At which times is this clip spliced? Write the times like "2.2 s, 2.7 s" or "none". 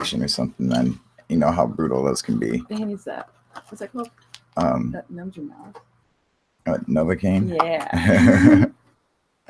4.4 s